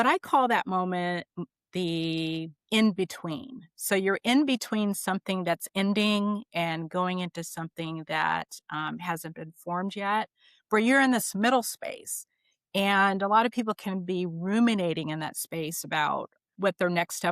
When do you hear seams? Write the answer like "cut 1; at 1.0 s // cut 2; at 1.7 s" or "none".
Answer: cut 1; at 16.4 s